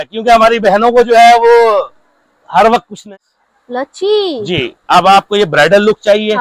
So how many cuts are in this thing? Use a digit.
1